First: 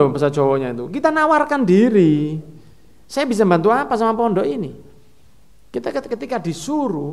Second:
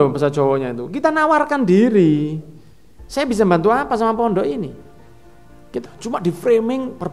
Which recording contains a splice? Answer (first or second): second